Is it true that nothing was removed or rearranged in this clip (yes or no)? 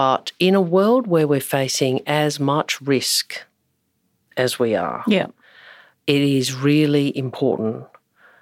yes